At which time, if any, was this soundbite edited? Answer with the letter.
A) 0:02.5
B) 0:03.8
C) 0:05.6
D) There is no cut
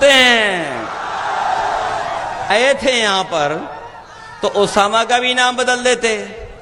A